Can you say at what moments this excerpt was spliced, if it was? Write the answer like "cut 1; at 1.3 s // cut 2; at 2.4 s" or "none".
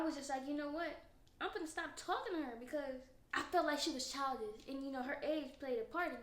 cut 1; at 3.1 s